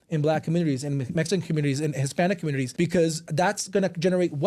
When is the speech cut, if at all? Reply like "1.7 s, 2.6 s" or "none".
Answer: 2.7 s, 3.2 s